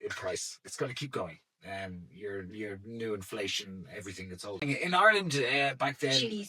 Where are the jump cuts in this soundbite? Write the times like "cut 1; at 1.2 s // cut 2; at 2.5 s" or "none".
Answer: cut 1; at 4.6 s